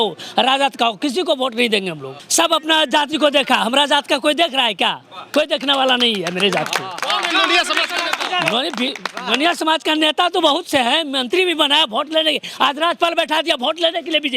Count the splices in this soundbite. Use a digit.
1